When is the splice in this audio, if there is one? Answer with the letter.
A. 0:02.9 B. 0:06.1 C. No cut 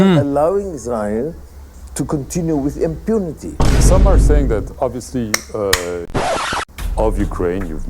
B